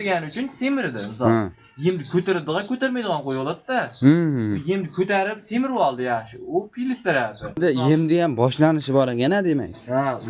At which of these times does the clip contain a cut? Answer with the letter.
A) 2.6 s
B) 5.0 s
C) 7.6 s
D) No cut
C